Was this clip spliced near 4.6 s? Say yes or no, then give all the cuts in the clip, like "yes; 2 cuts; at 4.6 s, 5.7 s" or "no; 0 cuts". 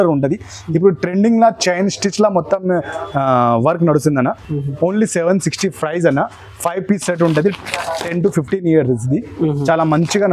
no; 0 cuts